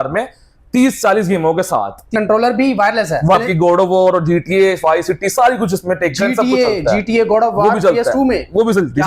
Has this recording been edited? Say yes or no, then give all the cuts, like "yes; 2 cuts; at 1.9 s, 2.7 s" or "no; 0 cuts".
yes; 2 cuts; at 2.1 s, 3.3 s